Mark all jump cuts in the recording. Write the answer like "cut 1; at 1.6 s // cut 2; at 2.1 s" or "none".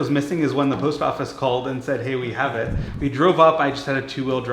cut 1; at 2.8 s

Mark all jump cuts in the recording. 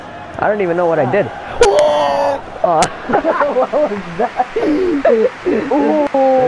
none

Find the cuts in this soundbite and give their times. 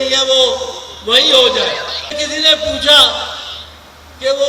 cut 1; at 2.2 s

